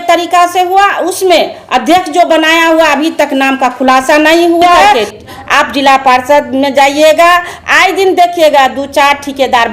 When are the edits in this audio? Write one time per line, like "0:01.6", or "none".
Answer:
0:05.0